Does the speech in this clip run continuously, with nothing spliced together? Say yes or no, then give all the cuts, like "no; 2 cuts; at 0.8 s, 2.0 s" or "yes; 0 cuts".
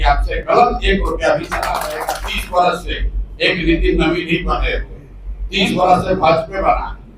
no; 1 cut; at 2.1 s